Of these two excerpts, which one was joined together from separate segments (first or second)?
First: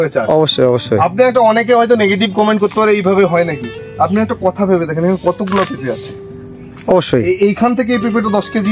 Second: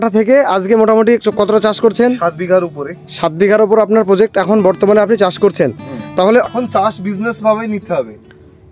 second